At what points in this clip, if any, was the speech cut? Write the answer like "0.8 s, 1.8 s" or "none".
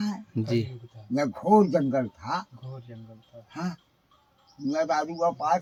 none